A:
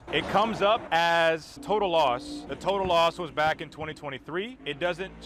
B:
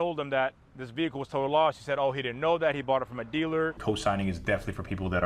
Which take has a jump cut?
B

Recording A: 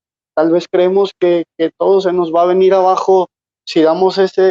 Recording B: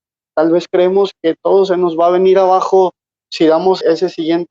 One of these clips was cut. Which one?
B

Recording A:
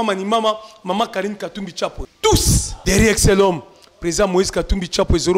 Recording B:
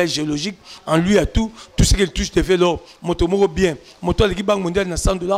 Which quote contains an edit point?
A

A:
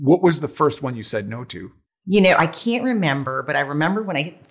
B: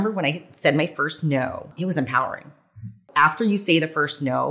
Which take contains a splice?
B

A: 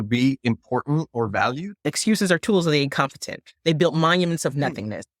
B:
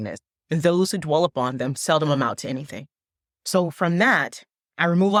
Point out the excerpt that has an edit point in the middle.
A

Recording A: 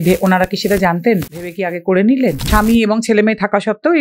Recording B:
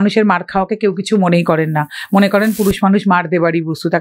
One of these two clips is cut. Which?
A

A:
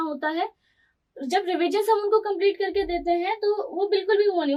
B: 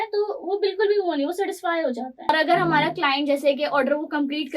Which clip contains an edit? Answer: B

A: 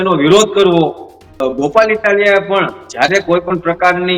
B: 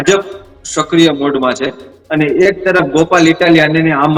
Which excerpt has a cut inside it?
A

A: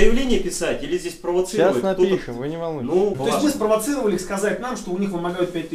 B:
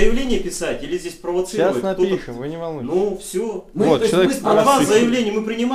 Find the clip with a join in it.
A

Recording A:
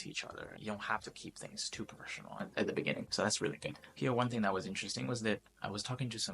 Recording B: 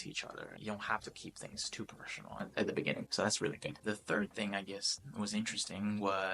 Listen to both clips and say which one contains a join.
A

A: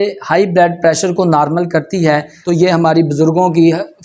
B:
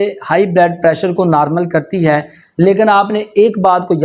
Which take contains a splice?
A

